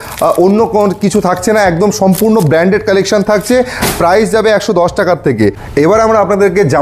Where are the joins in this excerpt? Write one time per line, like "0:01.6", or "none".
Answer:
0:05.6

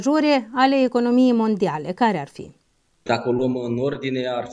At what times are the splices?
0:03.0

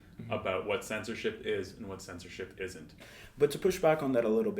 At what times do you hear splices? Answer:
0:03.1

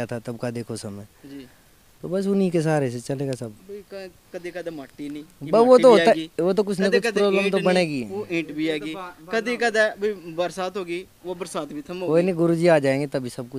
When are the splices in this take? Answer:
none

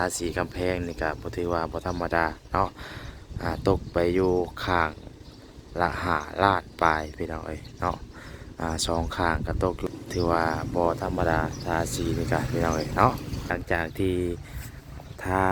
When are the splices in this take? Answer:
0:09.9
0:13.5

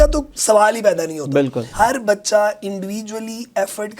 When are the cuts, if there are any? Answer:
0:01.6

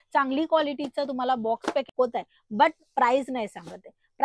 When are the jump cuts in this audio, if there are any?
0:01.9

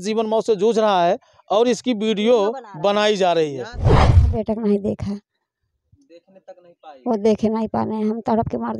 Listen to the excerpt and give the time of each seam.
0:04.1

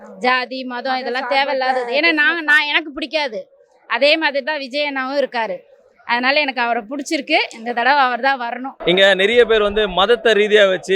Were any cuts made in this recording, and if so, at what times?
0:08.7

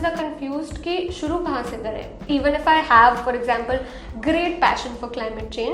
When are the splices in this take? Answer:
0:02.1

